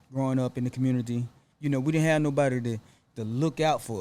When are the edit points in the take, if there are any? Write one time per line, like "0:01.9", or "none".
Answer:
0:01.5